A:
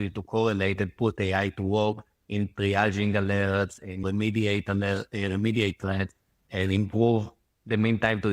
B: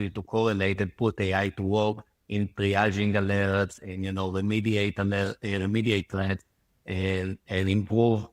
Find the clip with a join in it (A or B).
A